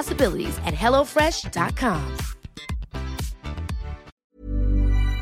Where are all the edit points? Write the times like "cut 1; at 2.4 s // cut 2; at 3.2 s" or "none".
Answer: cut 1; at 4.1 s